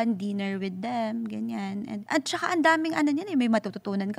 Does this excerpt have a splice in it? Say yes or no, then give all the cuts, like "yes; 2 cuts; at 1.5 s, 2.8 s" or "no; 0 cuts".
yes; 1 cut; at 2.0 s